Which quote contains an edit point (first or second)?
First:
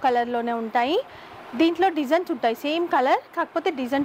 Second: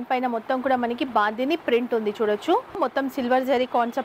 second